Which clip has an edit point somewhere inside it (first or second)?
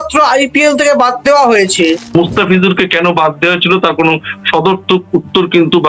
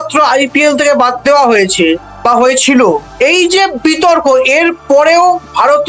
first